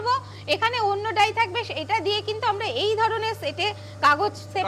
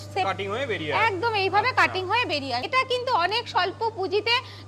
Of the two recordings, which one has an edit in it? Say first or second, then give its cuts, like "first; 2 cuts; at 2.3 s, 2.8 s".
second; 1 cut; at 2.7 s